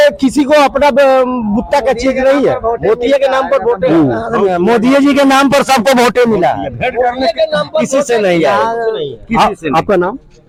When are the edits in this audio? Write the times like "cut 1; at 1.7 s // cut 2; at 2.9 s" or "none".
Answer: none